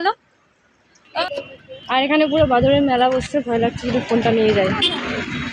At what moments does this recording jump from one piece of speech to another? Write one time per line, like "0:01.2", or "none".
0:01.2